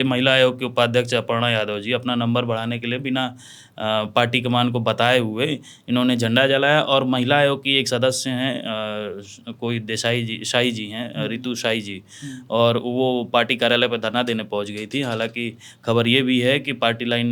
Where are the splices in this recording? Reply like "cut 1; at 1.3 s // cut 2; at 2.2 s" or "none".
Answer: none